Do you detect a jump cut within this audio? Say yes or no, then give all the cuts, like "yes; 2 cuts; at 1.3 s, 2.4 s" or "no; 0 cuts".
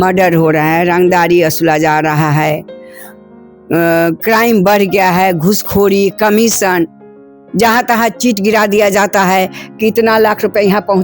no; 0 cuts